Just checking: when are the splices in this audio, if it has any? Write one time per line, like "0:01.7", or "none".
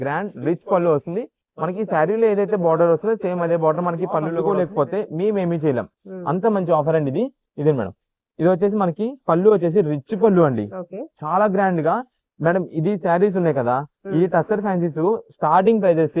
0:04.4